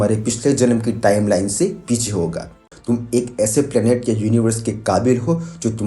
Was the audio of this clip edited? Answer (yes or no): yes